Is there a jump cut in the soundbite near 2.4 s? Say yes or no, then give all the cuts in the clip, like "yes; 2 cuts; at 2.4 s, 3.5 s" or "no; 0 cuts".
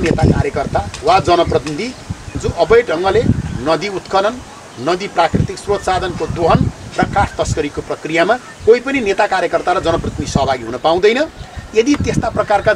yes; 1 cut; at 2.4 s